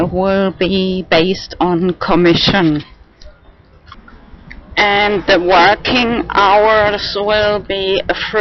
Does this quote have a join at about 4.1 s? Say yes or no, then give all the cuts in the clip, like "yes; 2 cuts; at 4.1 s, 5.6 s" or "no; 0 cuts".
no; 1 cut; at 7.1 s